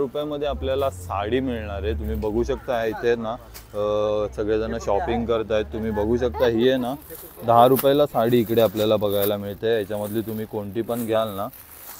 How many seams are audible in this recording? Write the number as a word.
zero